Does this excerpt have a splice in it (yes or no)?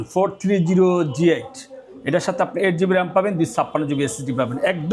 no